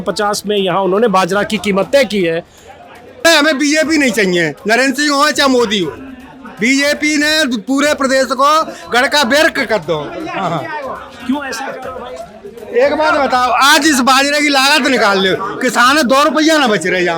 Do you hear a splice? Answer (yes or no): yes